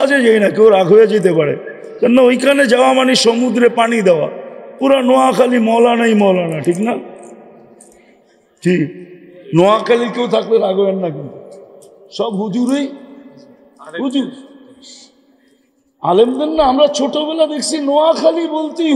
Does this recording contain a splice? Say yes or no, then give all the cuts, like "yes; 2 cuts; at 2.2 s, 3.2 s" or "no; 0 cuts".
no; 0 cuts